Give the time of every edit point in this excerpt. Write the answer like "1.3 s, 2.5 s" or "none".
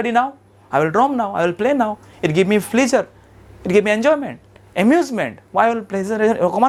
none

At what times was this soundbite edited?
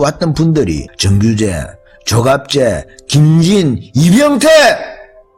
none

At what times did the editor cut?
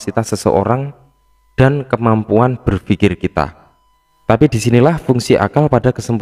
4.3 s

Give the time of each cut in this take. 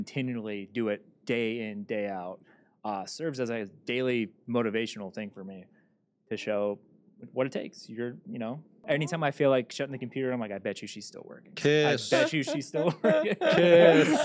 8.8 s

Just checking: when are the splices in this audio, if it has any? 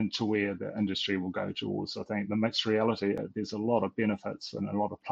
3.2 s

